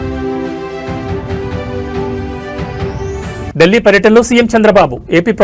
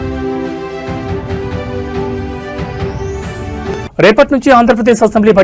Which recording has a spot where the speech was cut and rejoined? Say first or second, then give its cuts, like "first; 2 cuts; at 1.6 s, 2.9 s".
second; 1 cut; at 3.5 s